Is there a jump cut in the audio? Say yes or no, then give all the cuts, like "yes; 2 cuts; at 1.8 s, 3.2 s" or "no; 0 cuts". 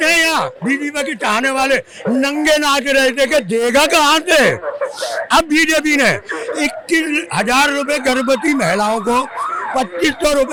no; 0 cuts